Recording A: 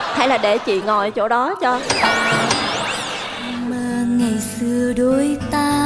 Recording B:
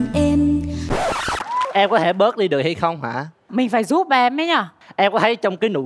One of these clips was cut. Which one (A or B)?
B